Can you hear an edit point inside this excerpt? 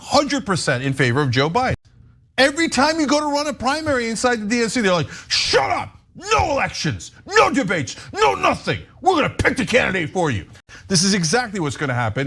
yes; 2 cuts; at 1.8 s, 10.6 s

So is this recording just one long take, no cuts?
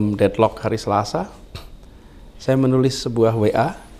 yes; 0 cuts

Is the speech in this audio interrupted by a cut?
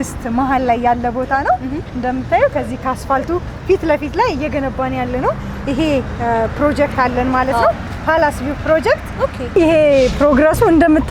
yes; 1 cut; at 9.4 s

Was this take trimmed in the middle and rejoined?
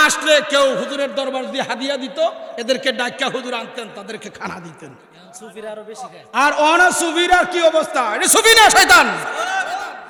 no; 0 cuts

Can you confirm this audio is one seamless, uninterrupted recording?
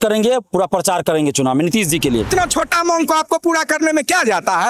no; 1 cut; at 2.3 s

